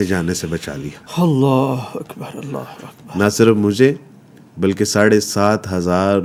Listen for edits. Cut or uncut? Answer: uncut